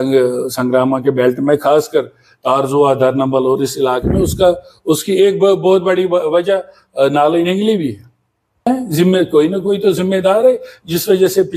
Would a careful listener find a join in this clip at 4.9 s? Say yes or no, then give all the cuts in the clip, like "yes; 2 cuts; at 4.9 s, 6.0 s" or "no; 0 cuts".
no; 1 cut; at 8.6 s